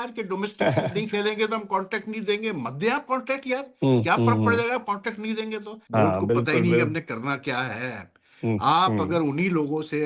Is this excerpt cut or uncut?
cut